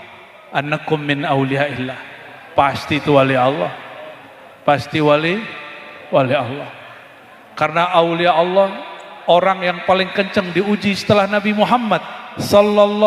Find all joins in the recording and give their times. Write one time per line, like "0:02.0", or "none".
none